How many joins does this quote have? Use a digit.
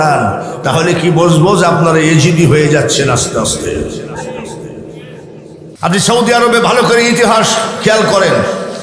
1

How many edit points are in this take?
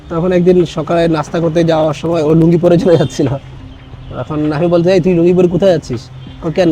0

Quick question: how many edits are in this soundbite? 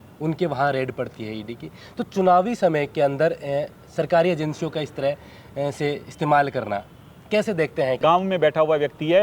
1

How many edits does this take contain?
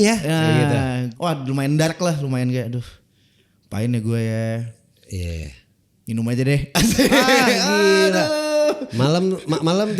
1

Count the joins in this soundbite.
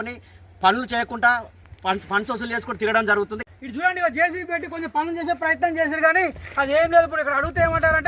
1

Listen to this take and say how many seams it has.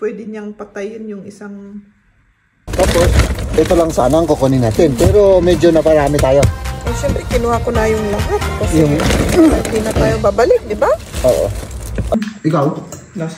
2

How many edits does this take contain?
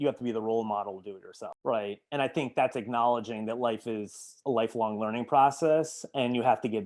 0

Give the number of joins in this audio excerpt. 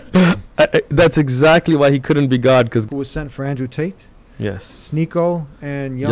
1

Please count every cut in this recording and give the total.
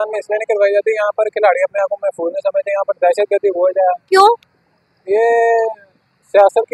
0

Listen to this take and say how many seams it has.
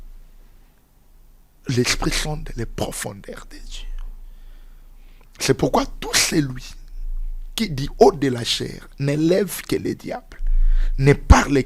0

